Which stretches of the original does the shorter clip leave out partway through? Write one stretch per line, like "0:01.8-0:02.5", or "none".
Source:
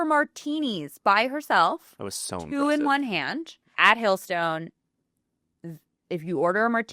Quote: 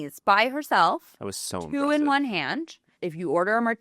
0:03.6-0:05.9